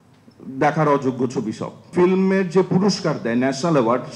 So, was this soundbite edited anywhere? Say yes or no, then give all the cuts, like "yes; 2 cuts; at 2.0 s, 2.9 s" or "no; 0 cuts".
yes; 1 cut; at 1.9 s